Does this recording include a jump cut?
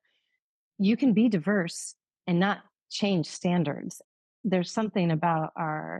yes; 1 cut; at 4.1 s

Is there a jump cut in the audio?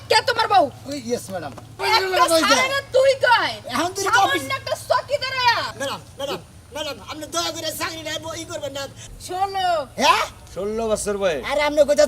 yes; 3 cuts; at 1.8 s, 5.7 s, 9.0 s

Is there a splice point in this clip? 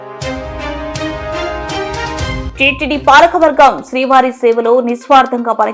yes; 1 cut; at 2.4 s

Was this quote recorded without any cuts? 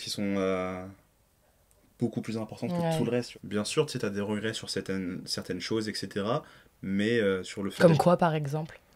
no; 1 cut; at 3.3 s

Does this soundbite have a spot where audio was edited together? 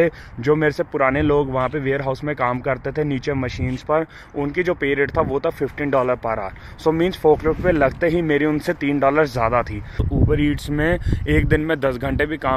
yes; 1 cut; at 9.8 s

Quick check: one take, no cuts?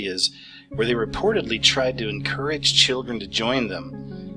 yes; 0 cuts

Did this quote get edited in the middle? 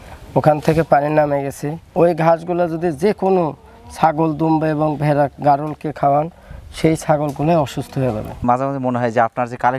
yes; 1 cut; at 8.3 s

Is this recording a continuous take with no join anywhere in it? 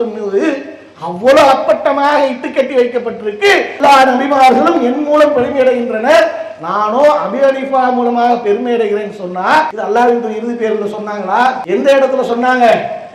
no; 3 cuts; at 3.7 s, 9.8 s, 11.6 s

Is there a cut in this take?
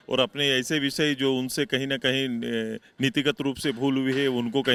no; 0 cuts

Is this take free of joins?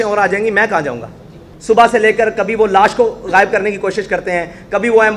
no; 1 cut; at 1.5 s

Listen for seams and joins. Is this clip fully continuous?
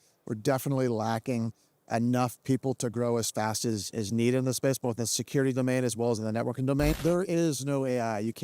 no; 1 cut; at 7.0 s

